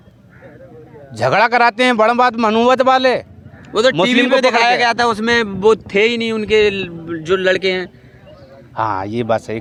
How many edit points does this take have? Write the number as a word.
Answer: zero